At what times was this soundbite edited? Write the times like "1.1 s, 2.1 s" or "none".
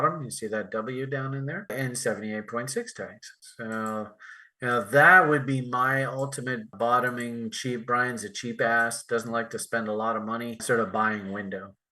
1.7 s, 6.7 s, 10.6 s